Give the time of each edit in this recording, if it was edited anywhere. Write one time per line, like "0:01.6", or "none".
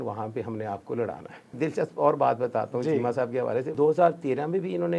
0:01.5
0:03.7